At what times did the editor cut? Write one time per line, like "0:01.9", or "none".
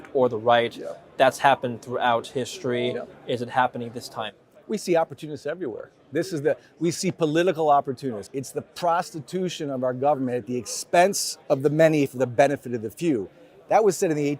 0:08.2